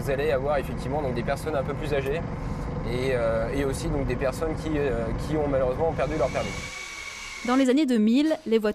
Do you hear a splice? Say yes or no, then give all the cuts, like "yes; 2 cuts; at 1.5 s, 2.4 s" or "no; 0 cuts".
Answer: yes; 1 cut; at 3.8 s